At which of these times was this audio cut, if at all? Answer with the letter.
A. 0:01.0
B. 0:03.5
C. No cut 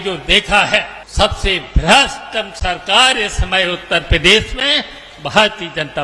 A